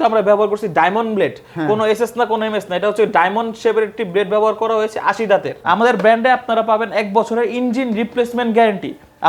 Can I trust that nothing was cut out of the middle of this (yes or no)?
no